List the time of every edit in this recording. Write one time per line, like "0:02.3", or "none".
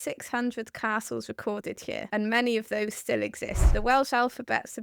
0:02.1
0:03.7